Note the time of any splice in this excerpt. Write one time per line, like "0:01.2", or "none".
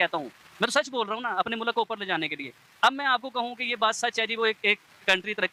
none